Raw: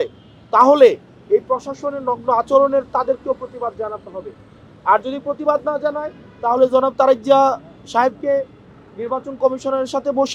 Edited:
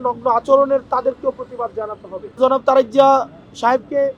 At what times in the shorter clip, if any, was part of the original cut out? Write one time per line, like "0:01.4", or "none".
0:02.4